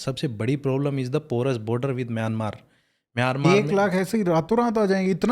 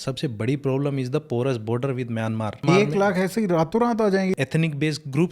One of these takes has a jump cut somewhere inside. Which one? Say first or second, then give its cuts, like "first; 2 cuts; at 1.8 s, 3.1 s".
second; 2 cuts; at 2.6 s, 4.4 s